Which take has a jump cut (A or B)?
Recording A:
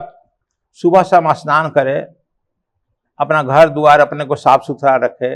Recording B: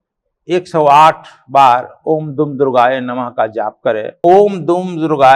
B